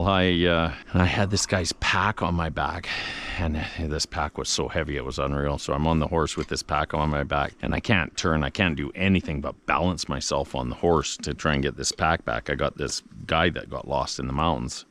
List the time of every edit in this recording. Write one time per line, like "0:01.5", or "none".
none